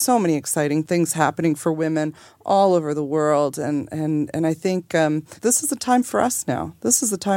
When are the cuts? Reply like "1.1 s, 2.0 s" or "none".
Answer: 0.8 s, 5.3 s